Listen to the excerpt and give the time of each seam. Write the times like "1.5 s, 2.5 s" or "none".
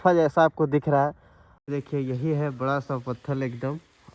1.7 s